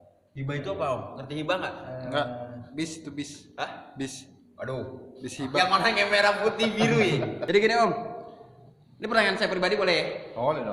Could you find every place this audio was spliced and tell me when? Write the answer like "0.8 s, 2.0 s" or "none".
7.4 s

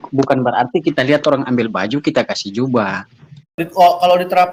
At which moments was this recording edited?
3.6 s

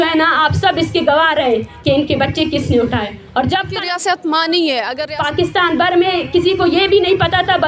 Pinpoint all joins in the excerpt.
3.7 s, 5.0 s

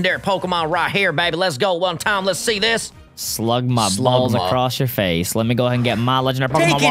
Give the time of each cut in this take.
none

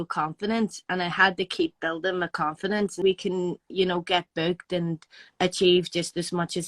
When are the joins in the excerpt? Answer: 3.0 s

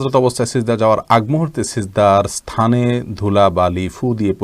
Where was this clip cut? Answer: none

